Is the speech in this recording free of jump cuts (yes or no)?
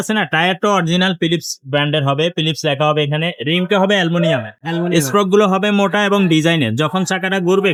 yes